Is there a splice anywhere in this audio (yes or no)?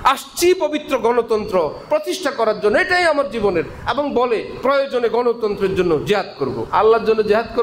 yes